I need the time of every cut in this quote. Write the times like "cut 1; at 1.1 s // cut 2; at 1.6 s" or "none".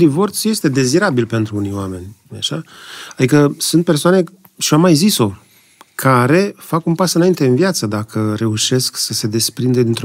none